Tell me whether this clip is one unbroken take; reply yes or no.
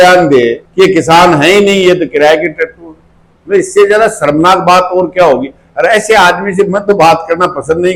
yes